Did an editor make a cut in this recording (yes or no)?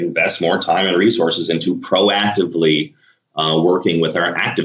no